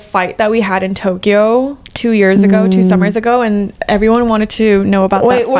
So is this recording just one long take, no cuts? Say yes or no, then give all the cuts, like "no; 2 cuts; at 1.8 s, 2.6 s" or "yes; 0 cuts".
yes; 0 cuts